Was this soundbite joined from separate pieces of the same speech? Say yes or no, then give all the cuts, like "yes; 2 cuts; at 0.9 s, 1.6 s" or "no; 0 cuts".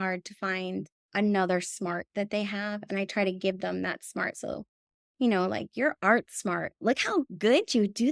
yes; 2 cuts; at 1.0 s, 6.7 s